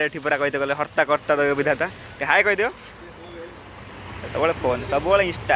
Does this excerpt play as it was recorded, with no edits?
yes; 0 cuts

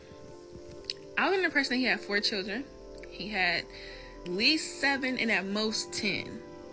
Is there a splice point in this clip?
yes; 1 cut; at 4.2 s

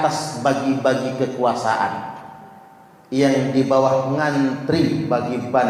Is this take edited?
no; 0 cuts

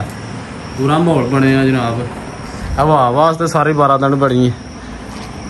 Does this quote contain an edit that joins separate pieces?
no; 0 cuts

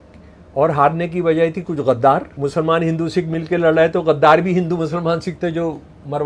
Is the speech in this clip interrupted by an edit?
yes; 1 cut; at 2.3 s

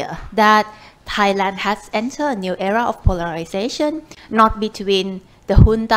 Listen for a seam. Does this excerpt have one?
no; 0 cuts

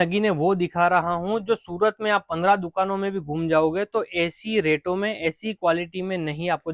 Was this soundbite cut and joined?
no; 0 cuts

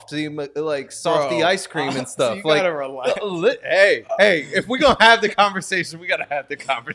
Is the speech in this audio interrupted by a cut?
no; 0 cuts

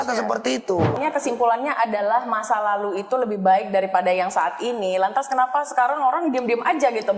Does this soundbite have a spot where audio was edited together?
yes; 1 cut; at 1.0 s

